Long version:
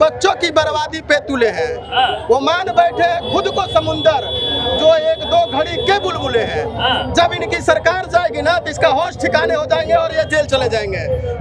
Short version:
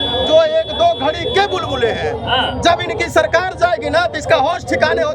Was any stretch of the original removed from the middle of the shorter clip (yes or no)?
no